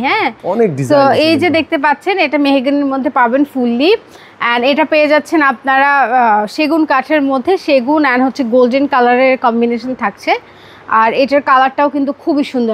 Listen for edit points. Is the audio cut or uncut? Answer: uncut